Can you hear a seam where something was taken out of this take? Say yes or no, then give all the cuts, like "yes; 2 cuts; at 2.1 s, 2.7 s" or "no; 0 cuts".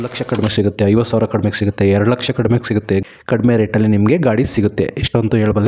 yes; 1 cut; at 3.0 s